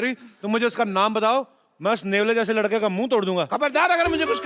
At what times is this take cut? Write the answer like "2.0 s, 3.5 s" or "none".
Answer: none